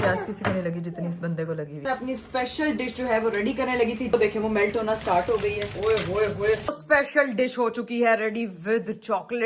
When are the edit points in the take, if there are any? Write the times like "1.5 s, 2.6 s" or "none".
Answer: 1.8 s, 4.1 s, 5.7 s, 6.8 s